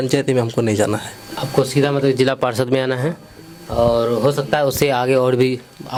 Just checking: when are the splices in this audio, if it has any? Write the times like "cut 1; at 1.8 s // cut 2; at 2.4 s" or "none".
none